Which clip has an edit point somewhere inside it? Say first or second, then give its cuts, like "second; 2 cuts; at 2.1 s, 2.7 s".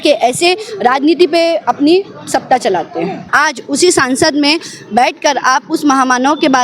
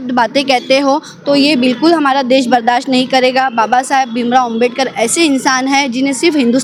first; 1 cut; at 3.3 s